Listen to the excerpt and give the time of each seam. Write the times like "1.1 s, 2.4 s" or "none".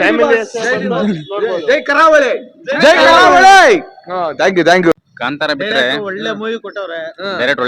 4.9 s